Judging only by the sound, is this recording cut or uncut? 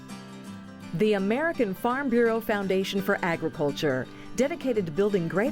cut